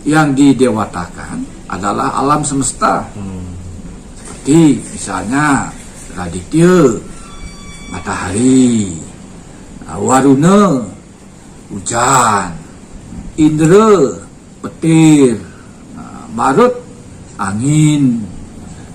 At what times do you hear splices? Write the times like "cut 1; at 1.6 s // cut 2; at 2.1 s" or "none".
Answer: none